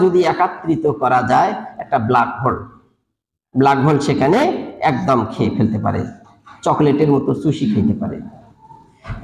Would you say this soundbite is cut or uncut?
uncut